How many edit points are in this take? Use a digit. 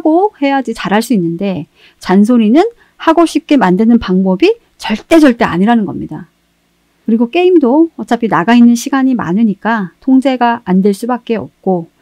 0